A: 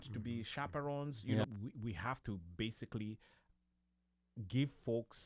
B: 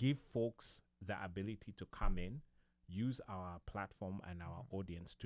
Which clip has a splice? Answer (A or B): A